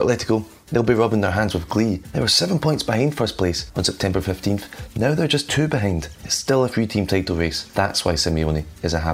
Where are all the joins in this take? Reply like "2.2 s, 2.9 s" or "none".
2.1 s, 3.6 s, 6.2 s